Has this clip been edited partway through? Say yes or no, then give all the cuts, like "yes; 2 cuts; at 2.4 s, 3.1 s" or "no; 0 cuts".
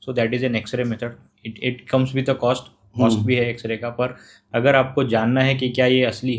no; 0 cuts